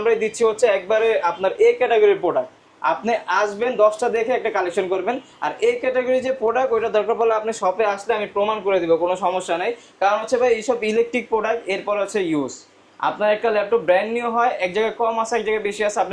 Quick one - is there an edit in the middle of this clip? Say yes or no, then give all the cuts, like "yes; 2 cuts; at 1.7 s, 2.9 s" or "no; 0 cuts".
no; 0 cuts